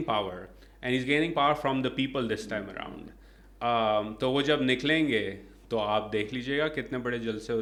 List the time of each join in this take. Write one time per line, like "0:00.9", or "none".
none